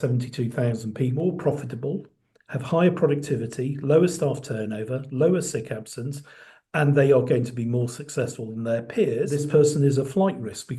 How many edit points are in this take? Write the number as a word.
two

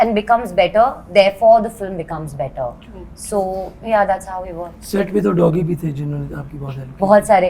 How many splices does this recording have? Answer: zero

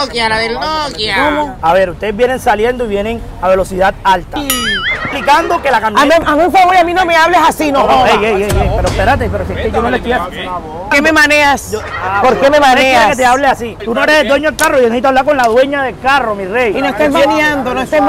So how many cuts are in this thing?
four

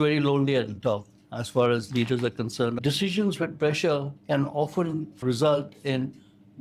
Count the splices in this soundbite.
one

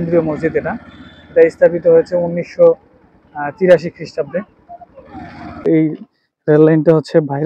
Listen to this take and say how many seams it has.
one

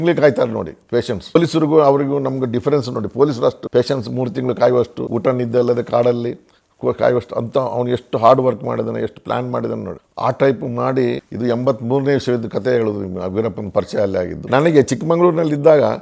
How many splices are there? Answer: four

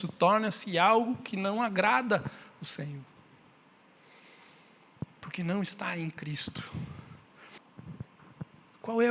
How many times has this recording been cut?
one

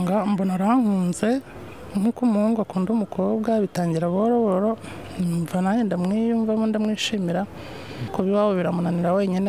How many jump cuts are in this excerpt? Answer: one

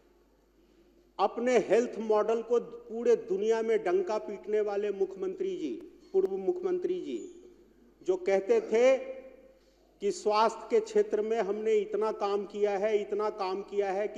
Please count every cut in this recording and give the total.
zero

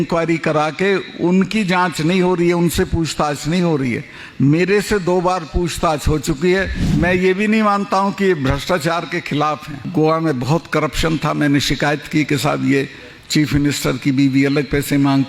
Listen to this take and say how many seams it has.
two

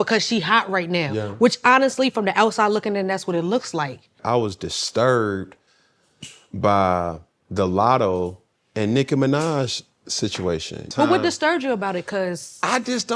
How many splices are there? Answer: two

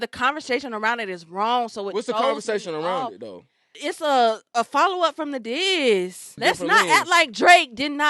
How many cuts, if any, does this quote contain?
two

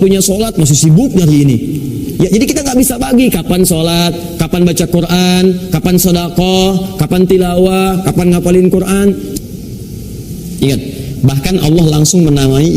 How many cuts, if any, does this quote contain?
one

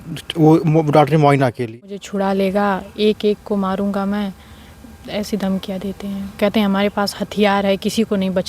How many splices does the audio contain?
one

